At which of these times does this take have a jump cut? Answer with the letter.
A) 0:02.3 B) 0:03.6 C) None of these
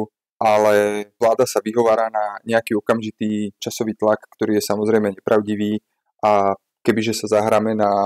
B